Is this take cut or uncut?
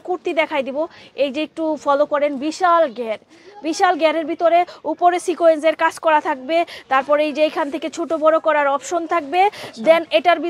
uncut